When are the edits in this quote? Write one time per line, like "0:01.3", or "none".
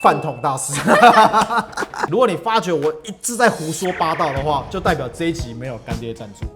0:01.9